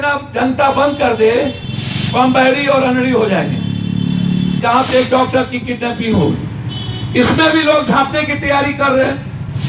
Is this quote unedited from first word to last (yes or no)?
no